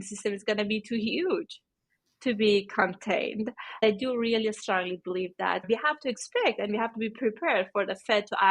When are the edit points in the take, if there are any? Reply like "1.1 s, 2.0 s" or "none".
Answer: 3.8 s, 5.6 s

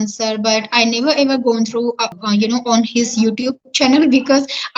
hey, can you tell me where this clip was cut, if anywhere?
2.1 s

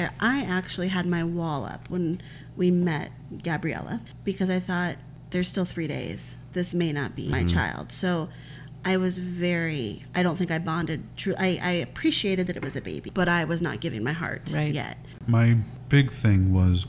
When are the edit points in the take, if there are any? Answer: 4.1 s, 5.1 s, 7.3 s, 13.0 s, 15.2 s

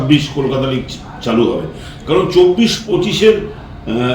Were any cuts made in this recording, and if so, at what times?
2.8 s

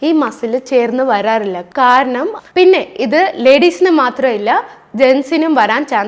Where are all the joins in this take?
2.4 s

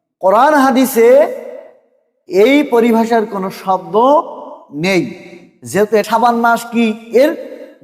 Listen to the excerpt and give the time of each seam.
6.0 s

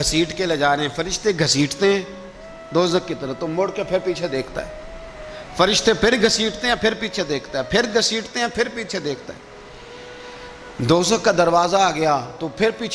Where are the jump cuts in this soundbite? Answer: none

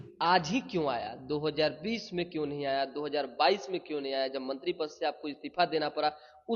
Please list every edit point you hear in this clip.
none

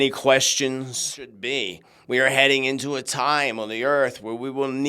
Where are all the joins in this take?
1.4 s

